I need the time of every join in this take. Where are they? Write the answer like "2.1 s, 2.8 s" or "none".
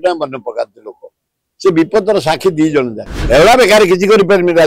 3.1 s